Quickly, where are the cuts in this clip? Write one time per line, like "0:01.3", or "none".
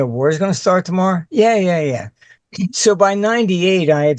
0:02.2